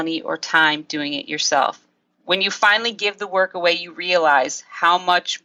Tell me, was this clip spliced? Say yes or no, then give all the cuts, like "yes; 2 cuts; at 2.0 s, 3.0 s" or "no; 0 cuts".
no; 0 cuts